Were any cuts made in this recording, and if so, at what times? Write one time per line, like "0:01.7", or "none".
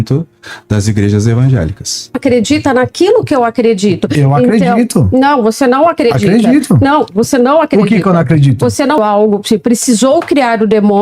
0:02.2
0:09.0